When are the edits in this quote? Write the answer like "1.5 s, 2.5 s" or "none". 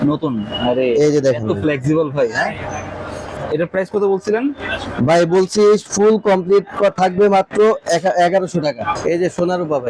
3.3 s, 8.9 s